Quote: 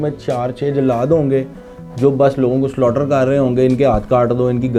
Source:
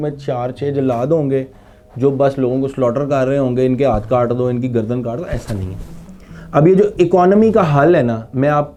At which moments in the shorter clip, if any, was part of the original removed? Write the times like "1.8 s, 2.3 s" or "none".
none